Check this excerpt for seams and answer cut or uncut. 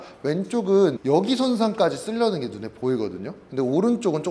uncut